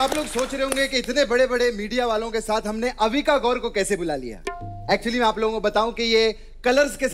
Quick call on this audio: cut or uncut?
uncut